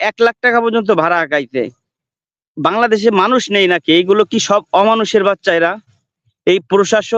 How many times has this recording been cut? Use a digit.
0